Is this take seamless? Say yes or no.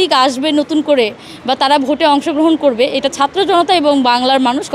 yes